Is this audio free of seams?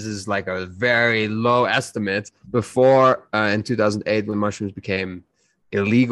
yes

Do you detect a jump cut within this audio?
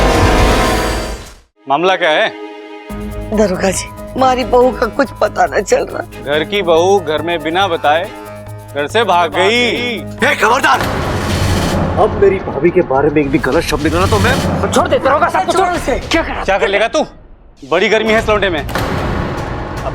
yes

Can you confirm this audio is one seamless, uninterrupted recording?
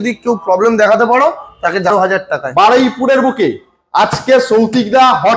no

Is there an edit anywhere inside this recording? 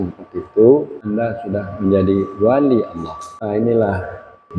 yes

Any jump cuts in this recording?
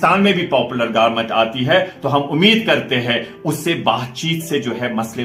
no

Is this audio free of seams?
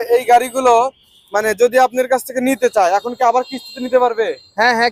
yes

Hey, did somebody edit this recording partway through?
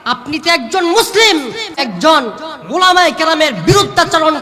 yes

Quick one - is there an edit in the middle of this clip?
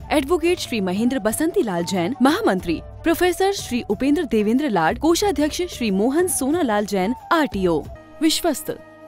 yes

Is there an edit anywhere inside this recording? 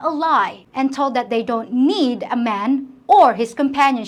no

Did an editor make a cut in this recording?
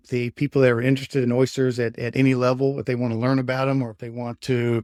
no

